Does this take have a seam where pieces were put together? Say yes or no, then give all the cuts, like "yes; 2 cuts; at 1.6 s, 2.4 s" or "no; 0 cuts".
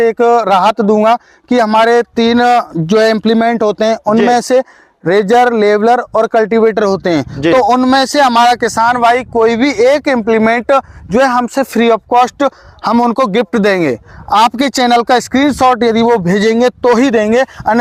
no; 0 cuts